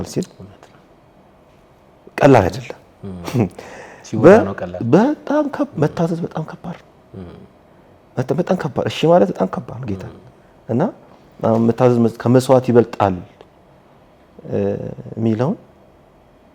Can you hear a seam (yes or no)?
no